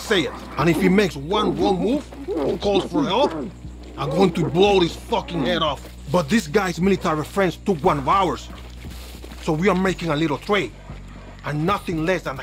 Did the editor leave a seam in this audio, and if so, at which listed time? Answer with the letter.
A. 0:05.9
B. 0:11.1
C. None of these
A